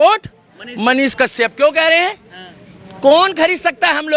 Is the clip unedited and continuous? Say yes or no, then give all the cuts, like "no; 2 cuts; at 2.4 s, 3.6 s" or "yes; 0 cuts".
yes; 0 cuts